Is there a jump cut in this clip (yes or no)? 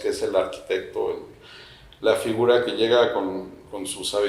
no